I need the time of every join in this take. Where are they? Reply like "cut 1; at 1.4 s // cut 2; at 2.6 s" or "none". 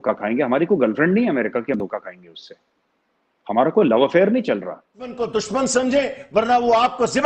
cut 1; at 5.2 s

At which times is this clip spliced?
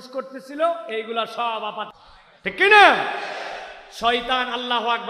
cut 1; at 2.0 s

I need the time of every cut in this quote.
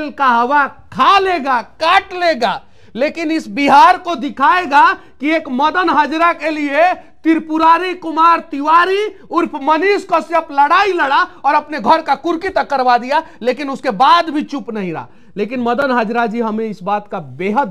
none

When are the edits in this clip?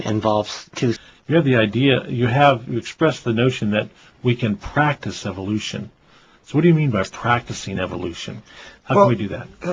none

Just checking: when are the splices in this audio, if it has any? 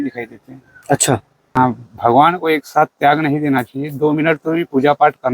cut 1; at 1.6 s

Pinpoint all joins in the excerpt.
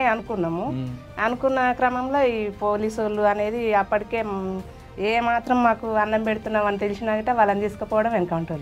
none

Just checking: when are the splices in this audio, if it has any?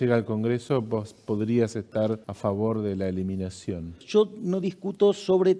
cut 1; at 2.3 s // cut 2; at 4.0 s

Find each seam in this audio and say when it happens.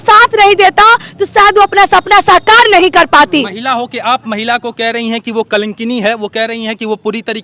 none

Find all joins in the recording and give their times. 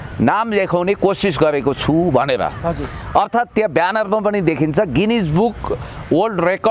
none

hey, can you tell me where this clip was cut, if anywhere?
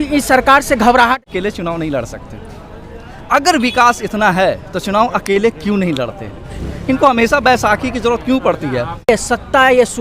cut 1; at 1.2 s // cut 2; at 9.1 s

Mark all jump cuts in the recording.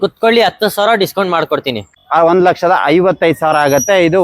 cut 1; at 1.9 s

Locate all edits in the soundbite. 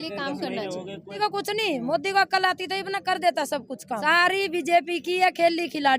cut 1; at 1.2 s // cut 2; at 4.0 s

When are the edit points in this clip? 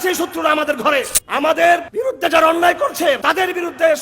cut 1; at 1.2 s // cut 2; at 1.9 s // cut 3; at 3.2 s

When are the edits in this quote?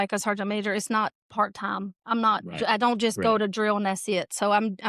none

